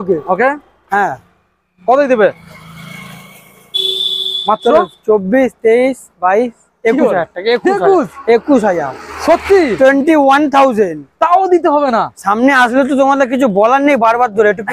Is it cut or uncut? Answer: uncut